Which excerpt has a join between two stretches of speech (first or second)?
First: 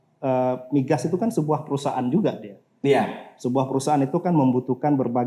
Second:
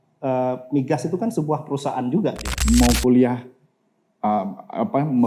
second